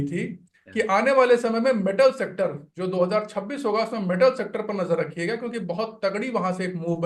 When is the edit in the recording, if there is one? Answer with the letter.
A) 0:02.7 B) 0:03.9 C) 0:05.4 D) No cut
D